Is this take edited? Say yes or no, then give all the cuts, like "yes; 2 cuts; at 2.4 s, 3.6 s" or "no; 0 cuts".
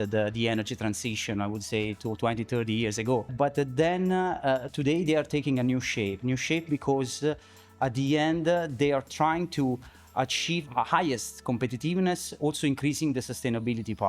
yes; 2 cuts; at 3.3 s, 10.6 s